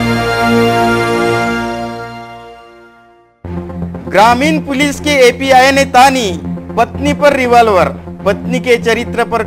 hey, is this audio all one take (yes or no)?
no